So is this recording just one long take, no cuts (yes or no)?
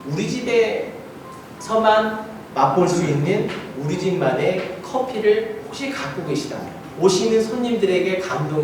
no